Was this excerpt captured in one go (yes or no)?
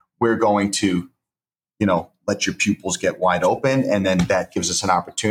yes